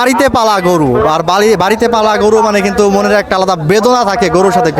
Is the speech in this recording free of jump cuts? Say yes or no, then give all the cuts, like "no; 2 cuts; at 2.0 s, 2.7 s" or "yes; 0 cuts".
yes; 0 cuts